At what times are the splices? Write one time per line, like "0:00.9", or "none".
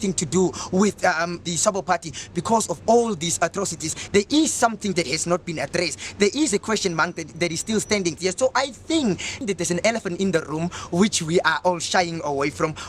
0:01.4
0:04.0
0:08.2
0:09.3